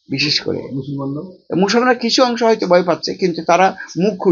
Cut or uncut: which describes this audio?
uncut